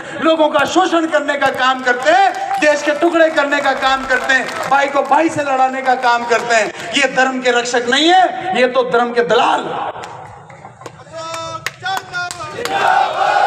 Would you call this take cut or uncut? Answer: uncut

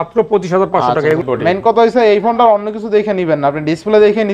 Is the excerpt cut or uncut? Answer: cut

